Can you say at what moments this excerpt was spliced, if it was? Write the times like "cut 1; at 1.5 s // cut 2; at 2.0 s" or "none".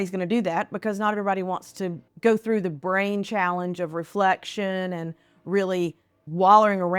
cut 1; at 2.1 s